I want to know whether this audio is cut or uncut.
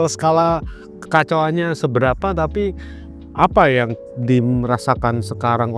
uncut